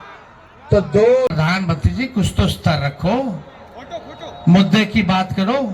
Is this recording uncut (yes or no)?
no